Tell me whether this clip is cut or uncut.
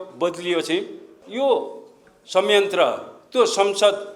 cut